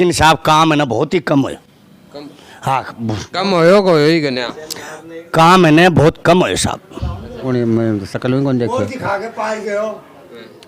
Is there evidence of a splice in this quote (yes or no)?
yes